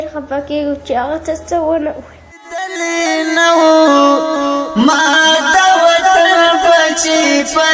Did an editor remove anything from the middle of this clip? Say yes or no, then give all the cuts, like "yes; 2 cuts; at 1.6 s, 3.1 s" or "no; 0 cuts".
no; 0 cuts